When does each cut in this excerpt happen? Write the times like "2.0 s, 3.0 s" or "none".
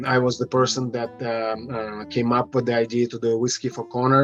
none